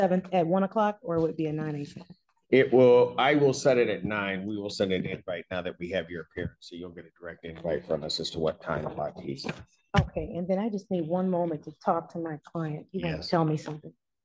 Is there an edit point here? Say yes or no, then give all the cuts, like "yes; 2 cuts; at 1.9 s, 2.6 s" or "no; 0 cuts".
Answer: no; 0 cuts